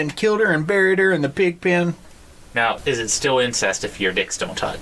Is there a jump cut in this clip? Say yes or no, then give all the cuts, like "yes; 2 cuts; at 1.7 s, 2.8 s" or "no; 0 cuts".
yes; 1 cut; at 2.4 s